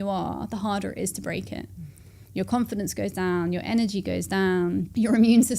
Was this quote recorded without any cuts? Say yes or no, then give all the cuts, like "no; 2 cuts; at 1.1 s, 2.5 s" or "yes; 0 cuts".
yes; 0 cuts